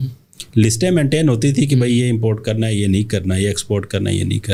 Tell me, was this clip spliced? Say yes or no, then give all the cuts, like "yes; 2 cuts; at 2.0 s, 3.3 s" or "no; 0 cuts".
no; 0 cuts